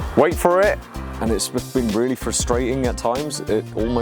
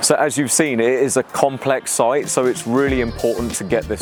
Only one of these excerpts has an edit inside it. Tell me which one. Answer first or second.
first